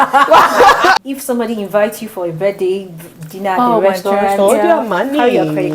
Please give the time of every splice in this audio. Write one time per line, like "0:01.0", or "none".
0:01.0